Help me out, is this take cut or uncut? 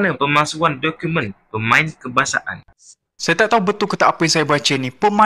cut